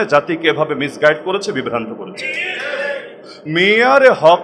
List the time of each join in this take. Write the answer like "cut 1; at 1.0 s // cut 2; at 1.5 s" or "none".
cut 1; at 3.4 s